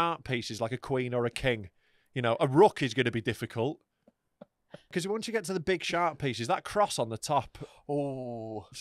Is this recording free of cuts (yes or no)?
no